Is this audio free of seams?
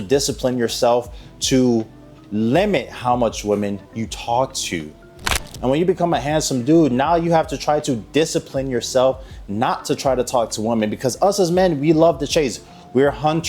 no; 1 cut; at 5.4 s

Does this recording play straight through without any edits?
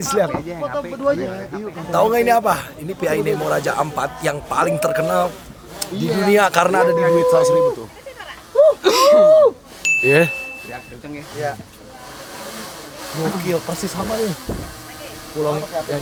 yes; 0 cuts

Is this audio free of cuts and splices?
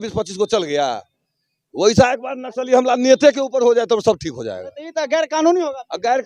yes; 0 cuts

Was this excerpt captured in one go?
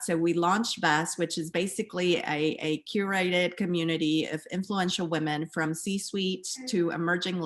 yes; 0 cuts

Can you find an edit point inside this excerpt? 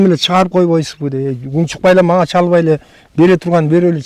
no; 0 cuts

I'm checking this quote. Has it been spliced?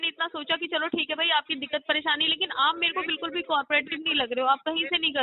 no; 0 cuts

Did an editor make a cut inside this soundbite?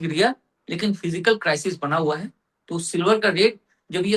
no; 0 cuts

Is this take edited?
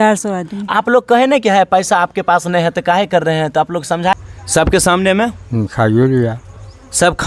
yes; 1 cut; at 4.1 s

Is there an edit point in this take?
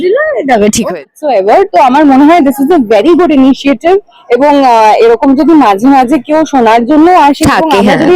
yes; 1 cut; at 1.0 s

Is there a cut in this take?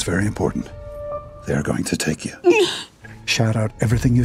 yes; 1 cut; at 1.3 s

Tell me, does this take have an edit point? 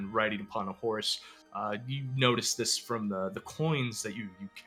no; 0 cuts

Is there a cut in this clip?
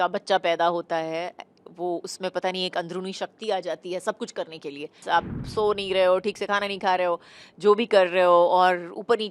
yes; 1 cut; at 4.9 s

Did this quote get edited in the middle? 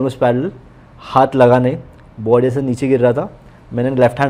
no; 0 cuts

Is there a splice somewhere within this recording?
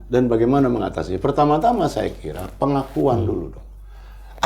no; 0 cuts

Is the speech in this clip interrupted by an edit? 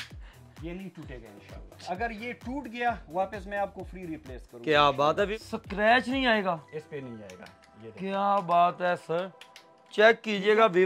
yes; 2 cuts; at 1.8 s, 5.3 s

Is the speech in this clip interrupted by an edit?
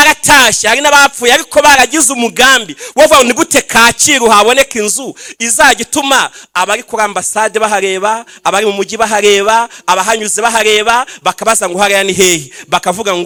no; 0 cuts

